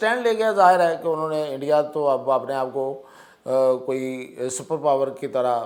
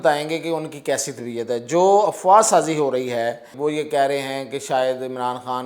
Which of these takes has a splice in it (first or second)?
second